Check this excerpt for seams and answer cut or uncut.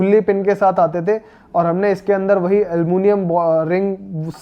uncut